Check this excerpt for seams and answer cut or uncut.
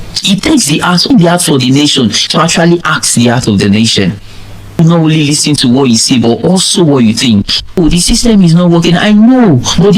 cut